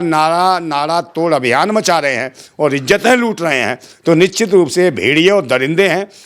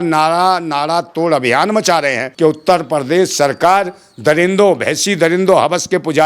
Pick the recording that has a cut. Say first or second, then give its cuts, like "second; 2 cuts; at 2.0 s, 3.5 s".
second; 1 cut; at 2.2 s